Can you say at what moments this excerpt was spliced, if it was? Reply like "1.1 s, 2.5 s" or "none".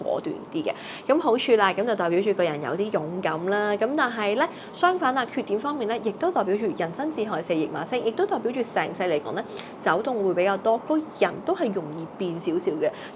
none